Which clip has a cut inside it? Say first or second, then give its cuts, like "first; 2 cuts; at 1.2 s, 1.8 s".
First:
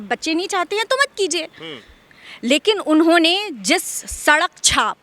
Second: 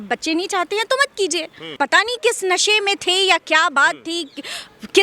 second; 1 cut; at 1.8 s